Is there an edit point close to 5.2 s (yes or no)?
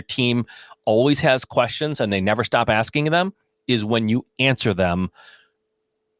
no